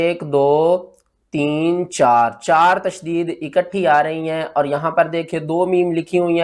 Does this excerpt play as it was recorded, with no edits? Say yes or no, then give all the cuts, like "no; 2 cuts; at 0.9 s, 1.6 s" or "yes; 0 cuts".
yes; 0 cuts